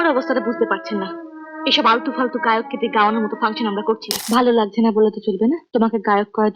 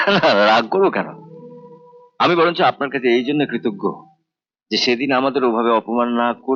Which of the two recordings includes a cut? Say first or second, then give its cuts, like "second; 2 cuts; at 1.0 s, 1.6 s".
first; 2 cuts; at 4.2 s, 5.6 s